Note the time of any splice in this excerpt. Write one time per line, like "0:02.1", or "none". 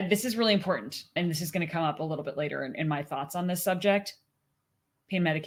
none